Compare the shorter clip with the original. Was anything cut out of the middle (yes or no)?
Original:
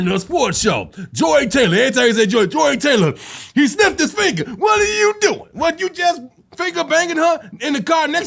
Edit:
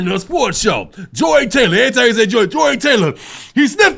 no